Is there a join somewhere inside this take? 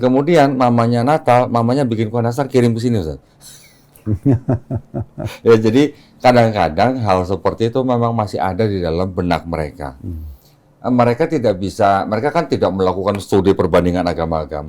no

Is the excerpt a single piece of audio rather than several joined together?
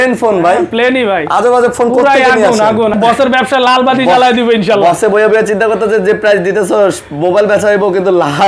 no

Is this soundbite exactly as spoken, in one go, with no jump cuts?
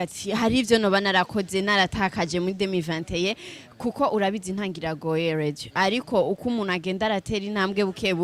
yes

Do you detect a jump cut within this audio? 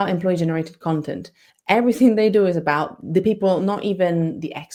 no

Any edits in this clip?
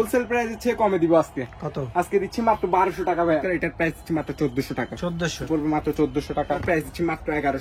yes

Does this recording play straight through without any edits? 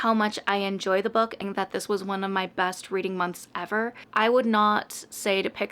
no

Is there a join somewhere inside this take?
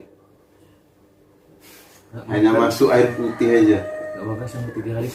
no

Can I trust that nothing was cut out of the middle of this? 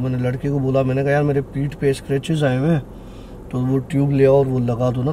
yes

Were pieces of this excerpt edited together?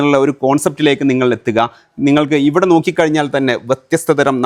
no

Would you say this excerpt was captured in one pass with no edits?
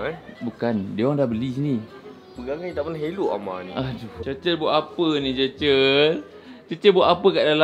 no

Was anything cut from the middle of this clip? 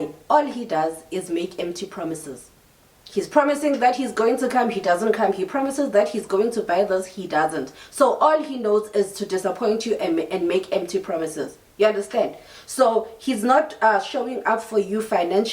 no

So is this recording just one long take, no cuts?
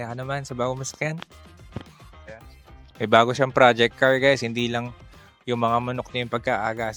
yes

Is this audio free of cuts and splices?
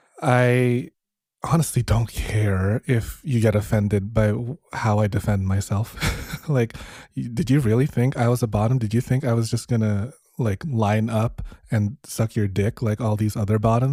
yes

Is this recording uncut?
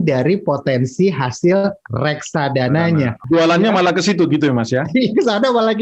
no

